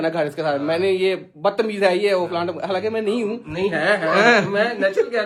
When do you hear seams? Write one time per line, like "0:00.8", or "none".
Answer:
none